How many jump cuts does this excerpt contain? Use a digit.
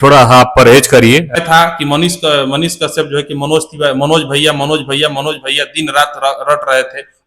1